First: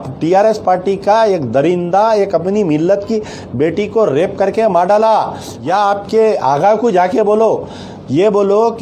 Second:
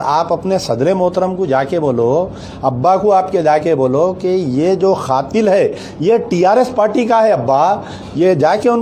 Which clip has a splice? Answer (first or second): first